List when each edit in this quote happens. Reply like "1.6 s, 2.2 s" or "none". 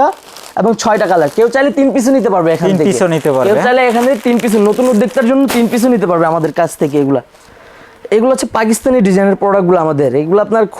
none